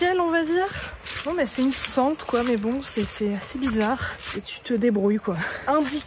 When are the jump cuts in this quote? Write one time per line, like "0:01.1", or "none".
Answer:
none